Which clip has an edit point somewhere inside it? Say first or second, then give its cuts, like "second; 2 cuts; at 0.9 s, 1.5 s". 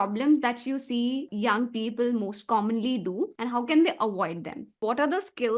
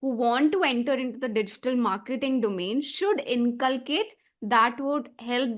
first; 3 cuts; at 1.3 s, 3.4 s, 4.8 s